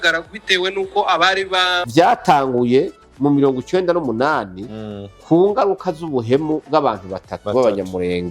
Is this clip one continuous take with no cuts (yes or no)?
no